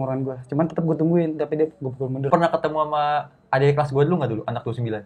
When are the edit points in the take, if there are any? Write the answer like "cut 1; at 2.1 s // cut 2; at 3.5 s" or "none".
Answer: cut 1; at 2.3 s